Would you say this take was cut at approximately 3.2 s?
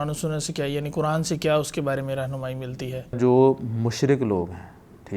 yes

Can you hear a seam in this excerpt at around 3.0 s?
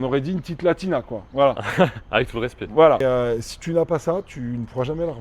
yes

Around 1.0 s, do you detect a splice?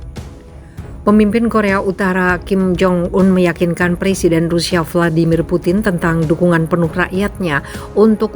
yes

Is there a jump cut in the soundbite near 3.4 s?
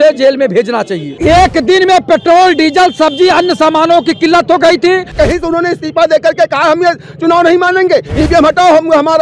no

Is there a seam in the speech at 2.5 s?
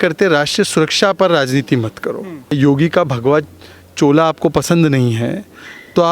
yes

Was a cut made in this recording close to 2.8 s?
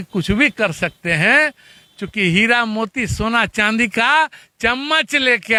no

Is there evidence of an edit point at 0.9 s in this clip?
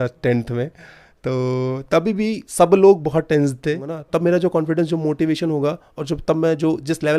no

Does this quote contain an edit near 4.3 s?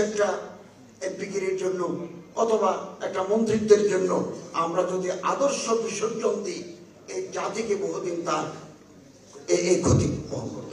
no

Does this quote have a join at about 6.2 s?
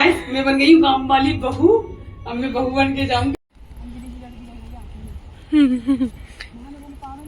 no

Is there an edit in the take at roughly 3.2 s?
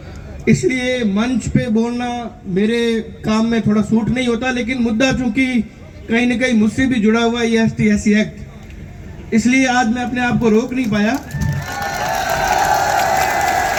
no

